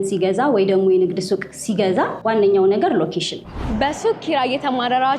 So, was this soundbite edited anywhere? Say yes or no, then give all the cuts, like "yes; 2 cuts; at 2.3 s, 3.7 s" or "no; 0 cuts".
yes; 2 cuts; at 2.2 s, 3.4 s